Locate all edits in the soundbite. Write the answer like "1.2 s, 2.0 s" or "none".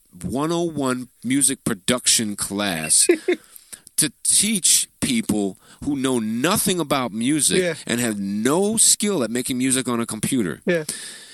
none